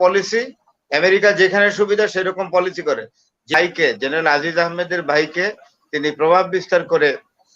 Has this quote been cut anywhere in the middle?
yes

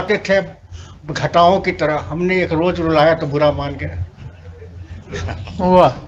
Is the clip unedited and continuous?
yes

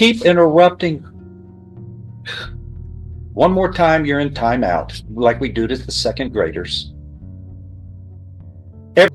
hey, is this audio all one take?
yes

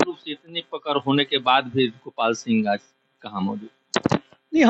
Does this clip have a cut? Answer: no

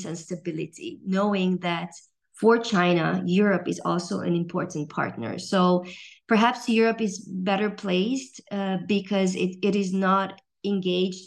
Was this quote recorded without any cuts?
yes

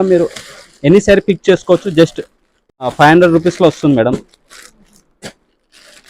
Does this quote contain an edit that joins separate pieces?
yes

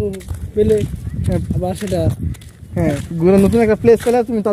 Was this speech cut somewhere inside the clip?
no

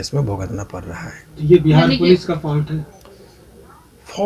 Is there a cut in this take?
no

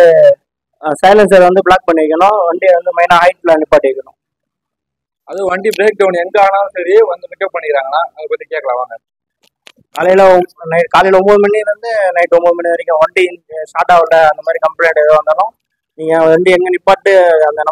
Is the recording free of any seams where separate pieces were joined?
yes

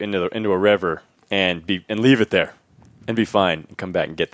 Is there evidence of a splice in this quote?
no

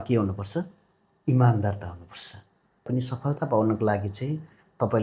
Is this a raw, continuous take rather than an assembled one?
no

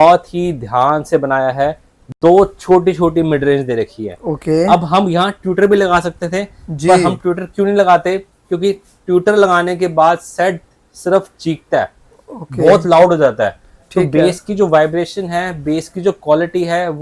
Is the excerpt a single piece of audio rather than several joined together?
yes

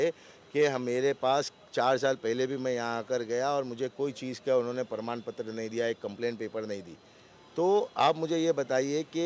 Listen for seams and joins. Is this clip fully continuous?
yes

